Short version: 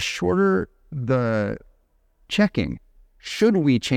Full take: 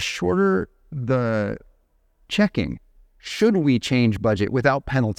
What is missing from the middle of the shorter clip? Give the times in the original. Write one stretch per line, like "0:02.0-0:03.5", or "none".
none